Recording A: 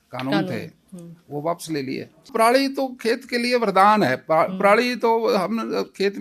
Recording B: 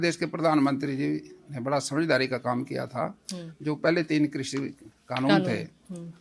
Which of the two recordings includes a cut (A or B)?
A